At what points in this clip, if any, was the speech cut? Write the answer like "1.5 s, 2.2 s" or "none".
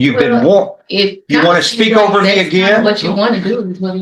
none